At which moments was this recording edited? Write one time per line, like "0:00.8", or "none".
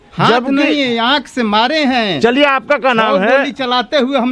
none